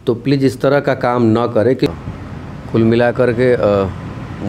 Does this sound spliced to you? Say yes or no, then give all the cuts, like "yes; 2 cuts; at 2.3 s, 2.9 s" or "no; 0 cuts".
yes; 1 cut; at 1.9 s